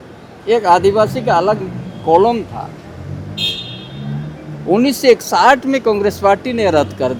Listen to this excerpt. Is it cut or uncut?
uncut